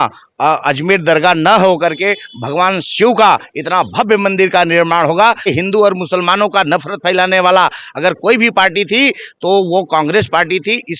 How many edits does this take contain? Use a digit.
1